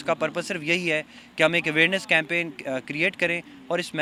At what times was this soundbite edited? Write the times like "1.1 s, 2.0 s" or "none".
none